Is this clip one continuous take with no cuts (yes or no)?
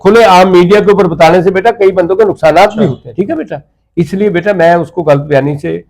no